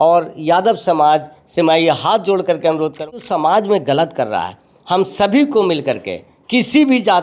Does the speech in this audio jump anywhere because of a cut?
yes; 1 cut; at 3.1 s

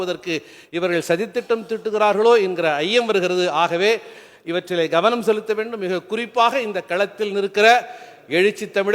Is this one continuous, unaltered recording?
yes; 0 cuts

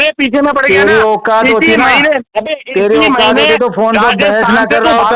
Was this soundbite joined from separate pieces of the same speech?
no; 0 cuts

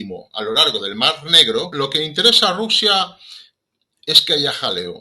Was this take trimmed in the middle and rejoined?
yes; 1 cut; at 1.7 s

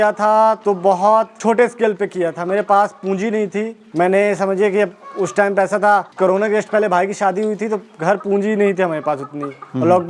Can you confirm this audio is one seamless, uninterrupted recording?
yes; 0 cuts

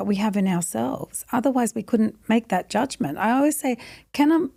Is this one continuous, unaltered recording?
yes; 0 cuts

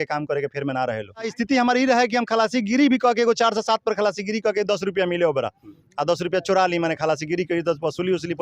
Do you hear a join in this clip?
yes; 1 cut; at 1.3 s

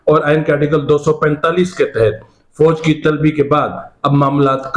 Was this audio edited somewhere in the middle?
no; 0 cuts

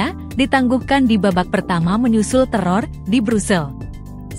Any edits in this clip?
no; 0 cuts

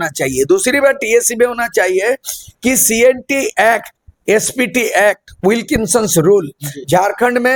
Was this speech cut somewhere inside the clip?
no; 0 cuts

